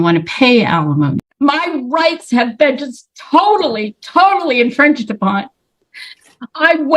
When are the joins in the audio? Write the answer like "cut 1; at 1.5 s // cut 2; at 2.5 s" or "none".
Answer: cut 1; at 1.2 s